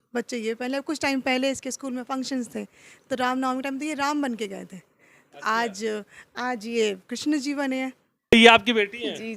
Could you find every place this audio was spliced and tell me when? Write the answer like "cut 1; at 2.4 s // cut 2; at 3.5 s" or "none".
cut 1; at 8.3 s